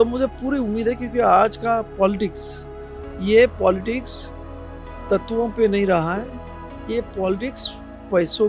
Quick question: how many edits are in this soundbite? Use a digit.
0